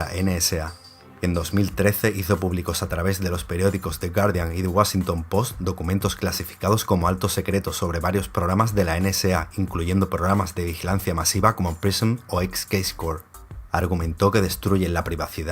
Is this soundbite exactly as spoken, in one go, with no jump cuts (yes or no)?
no